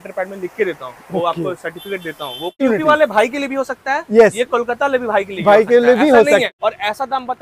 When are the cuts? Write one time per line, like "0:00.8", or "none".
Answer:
0:02.6
0:06.5